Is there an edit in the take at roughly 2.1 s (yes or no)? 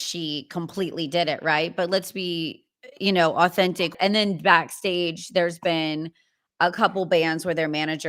no